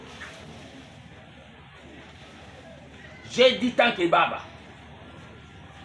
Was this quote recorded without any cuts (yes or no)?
yes